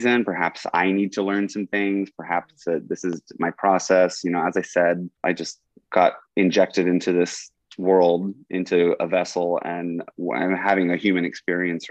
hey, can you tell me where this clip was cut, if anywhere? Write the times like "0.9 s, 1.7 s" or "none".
5.1 s